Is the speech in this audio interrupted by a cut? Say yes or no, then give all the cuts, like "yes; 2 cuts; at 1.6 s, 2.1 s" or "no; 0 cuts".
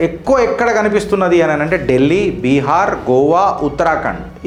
no; 0 cuts